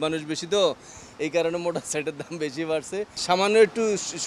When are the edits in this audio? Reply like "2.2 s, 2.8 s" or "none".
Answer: 3.2 s